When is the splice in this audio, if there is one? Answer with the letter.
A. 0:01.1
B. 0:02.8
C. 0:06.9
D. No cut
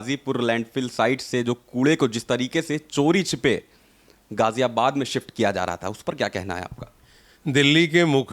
D